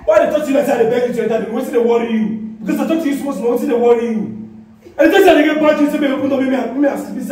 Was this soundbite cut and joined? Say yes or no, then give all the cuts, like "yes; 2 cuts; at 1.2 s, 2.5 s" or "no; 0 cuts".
no; 0 cuts